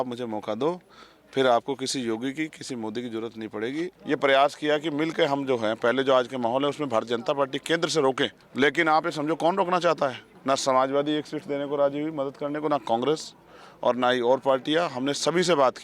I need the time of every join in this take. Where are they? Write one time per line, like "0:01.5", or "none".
0:03.9
0:08.4
0:10.3